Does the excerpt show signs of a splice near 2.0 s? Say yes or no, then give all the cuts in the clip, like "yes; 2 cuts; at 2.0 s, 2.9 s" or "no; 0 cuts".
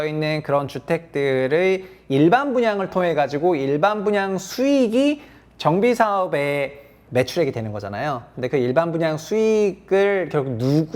no; 1 cut; at 7.0 s